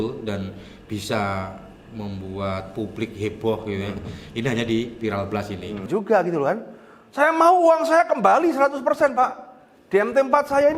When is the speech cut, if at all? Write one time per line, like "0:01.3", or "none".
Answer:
0:05.8